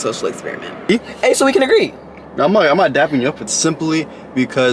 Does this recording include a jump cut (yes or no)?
yes